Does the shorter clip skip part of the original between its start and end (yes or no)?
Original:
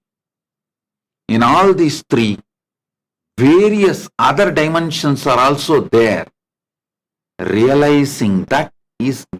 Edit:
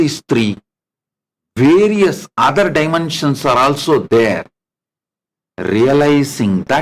no